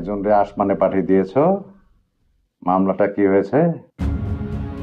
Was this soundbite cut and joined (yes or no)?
yes